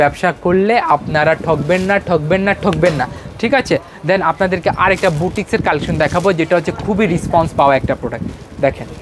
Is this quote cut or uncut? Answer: uncut